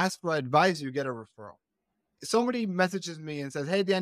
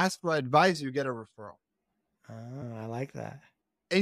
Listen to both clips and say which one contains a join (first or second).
first